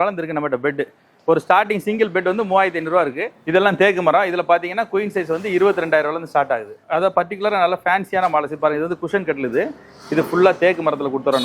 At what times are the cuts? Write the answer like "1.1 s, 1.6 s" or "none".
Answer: 3.3 s, 6.7 s

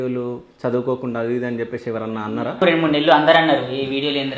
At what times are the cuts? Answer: 2.6 s

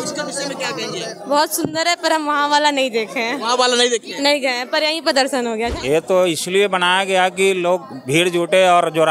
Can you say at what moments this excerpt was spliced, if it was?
5.8 s

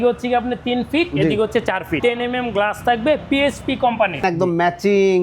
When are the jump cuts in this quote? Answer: 1.9 s, 4.2 s

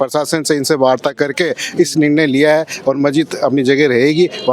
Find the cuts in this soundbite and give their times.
none

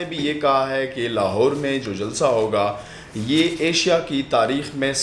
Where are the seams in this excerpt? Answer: none

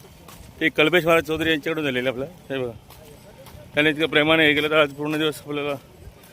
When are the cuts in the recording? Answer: 2.4 s

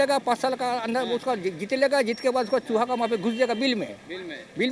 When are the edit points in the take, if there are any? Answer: none

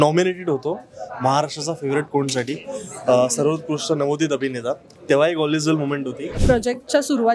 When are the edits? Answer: 6.4 s

